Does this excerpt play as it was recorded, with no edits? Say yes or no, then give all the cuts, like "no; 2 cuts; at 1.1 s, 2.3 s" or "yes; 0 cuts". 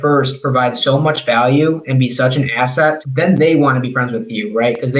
yes; 0 cuts